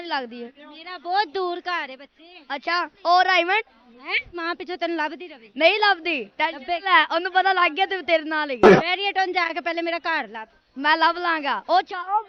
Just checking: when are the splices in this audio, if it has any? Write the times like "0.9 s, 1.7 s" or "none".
4.3 s, 8.8 s